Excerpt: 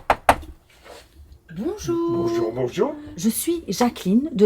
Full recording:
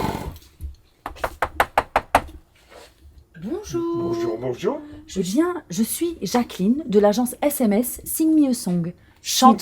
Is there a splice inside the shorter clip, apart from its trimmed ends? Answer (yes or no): yes